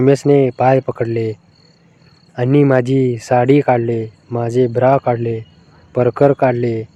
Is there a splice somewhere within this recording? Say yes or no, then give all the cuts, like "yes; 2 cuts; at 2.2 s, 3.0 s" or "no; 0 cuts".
no; 0 cuts